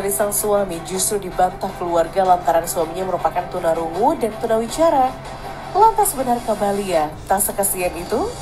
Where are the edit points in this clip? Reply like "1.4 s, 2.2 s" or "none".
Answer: none